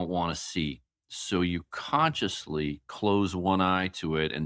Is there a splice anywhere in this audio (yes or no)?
no